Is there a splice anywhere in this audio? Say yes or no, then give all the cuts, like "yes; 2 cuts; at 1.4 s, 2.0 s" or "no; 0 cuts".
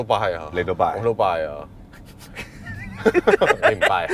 no; 0 cuts